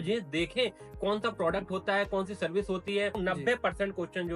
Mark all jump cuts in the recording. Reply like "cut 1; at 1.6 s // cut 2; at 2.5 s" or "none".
cut 1; at 3.2 s